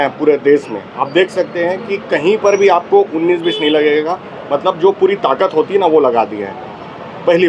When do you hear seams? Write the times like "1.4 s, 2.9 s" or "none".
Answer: none